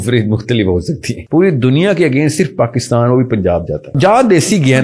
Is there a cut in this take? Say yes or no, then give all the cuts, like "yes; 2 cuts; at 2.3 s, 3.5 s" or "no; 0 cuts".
yes; 2 cuts; at 1.1 s, 3.9 s